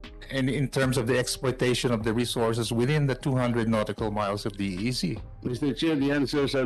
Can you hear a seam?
yes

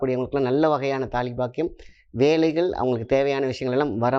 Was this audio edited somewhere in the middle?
no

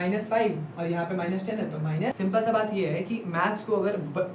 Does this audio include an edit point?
yes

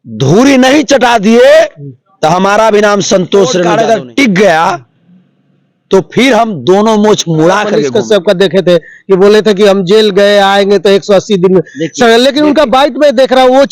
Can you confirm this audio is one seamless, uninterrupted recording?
no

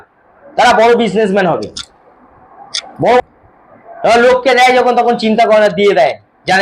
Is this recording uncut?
no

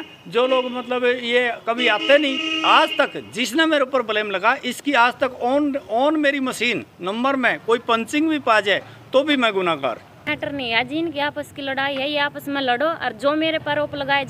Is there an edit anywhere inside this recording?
yes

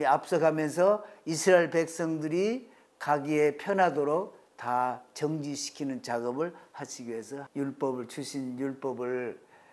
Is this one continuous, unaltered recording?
no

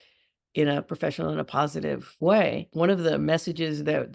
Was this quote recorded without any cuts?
no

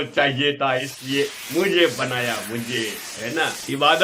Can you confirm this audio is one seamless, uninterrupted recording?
no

